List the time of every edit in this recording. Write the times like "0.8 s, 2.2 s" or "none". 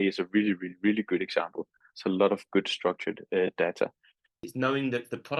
4.4 s